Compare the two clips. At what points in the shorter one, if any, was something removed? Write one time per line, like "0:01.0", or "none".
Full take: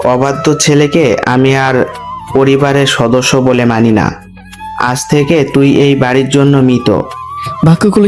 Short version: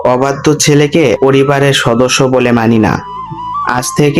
0:01.2